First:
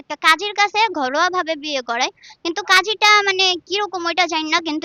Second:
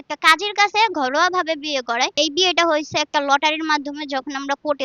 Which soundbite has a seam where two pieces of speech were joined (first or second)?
second